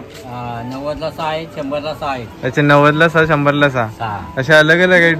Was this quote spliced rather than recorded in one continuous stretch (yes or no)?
no